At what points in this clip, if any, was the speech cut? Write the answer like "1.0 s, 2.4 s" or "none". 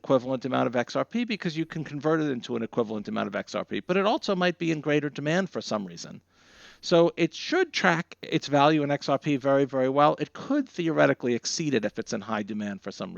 12.2 s